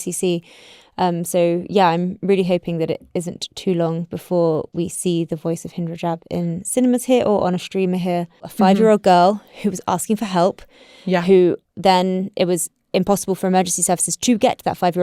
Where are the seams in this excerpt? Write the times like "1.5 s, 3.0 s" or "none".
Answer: 8.5 s